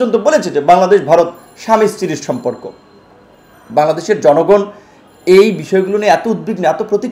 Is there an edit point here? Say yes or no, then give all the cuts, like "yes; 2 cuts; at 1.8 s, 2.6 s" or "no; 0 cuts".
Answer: no; 0 cuts